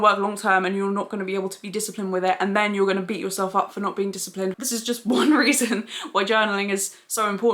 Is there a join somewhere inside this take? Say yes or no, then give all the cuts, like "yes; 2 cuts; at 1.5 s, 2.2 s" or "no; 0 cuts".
yes; 1 cut; at 4.5 s